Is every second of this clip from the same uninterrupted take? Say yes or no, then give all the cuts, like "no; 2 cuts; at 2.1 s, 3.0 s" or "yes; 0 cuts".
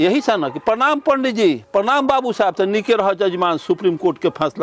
yes; 0 cuts